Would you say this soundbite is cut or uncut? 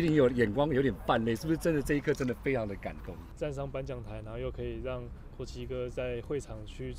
cut